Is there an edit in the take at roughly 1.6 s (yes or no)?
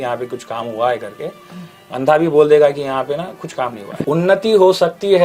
no